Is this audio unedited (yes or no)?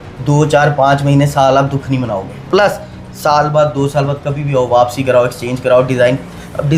no